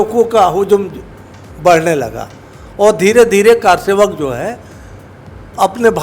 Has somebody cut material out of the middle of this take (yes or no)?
no